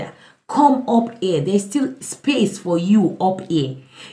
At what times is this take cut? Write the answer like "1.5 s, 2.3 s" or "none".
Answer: none